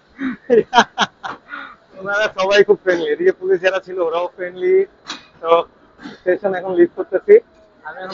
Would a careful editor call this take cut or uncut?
uncut